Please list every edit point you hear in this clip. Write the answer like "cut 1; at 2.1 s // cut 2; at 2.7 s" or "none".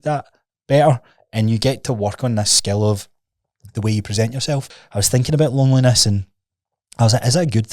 cut 1; at 4.8 s